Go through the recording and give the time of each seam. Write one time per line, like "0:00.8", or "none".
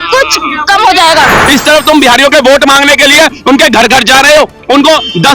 0:01.4